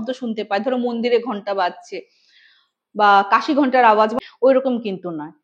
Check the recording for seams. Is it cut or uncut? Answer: cut